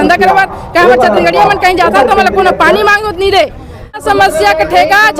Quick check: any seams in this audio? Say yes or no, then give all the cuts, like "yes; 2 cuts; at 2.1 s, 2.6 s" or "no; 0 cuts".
yes; 1 cut; at 4.0 s